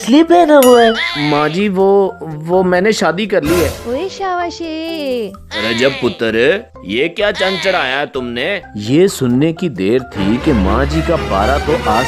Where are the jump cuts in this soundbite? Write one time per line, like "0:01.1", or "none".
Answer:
0:01.1
0:03.8
0:08.6